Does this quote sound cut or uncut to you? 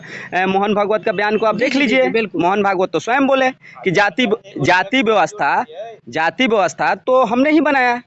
uncut